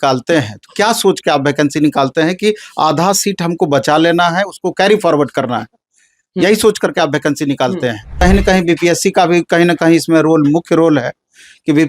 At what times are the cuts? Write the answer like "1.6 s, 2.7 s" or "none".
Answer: 8.2 s